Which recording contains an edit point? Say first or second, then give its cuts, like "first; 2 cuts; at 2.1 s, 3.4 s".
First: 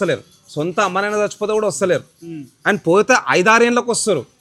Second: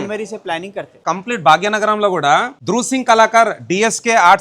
second; 2 cuts; at 1.1 s, 2.5 s